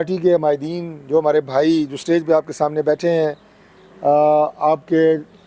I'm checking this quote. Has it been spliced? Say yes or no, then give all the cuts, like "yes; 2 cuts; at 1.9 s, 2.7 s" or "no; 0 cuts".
no; 0 cuts